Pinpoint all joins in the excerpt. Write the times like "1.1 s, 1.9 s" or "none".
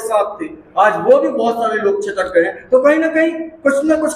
none